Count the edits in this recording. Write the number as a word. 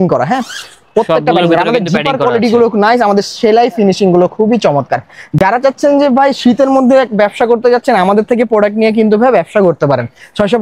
zero